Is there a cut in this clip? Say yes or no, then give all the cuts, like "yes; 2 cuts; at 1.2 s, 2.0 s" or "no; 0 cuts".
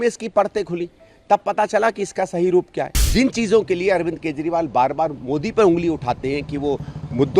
yes; 1 cut; at 3.0 s